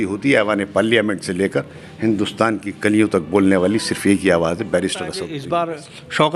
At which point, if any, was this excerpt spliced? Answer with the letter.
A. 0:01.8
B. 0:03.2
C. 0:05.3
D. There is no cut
C